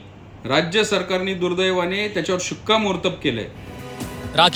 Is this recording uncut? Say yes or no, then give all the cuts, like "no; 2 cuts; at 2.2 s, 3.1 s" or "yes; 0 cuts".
yes; 0 cuts